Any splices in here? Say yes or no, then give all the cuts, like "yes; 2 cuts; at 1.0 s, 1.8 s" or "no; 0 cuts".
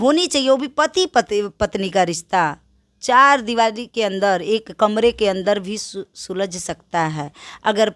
no; 0 cuts